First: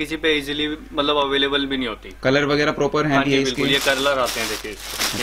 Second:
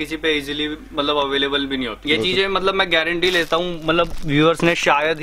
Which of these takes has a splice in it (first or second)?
second